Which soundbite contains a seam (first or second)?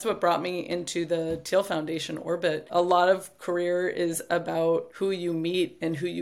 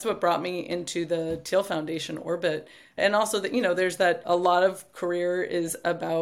first